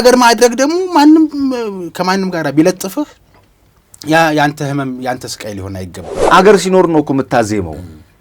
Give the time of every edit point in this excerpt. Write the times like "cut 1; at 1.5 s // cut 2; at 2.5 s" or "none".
cut 1; at 6.1 s